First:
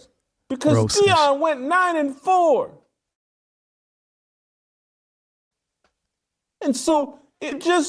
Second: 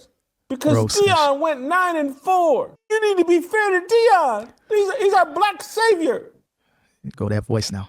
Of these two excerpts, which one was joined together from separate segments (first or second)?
second